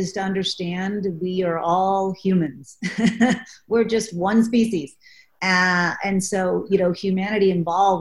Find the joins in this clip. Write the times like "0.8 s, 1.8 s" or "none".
none